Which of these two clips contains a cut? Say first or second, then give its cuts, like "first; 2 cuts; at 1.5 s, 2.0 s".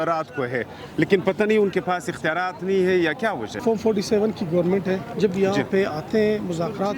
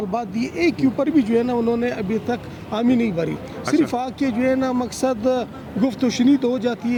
first; 2 cuts; at 3.6 s, 5.1 s